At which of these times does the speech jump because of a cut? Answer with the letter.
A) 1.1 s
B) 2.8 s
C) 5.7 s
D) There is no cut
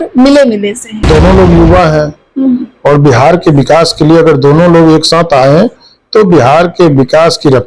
A